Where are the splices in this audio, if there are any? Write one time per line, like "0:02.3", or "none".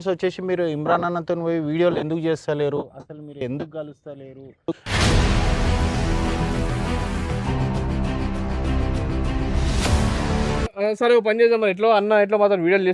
0:10.7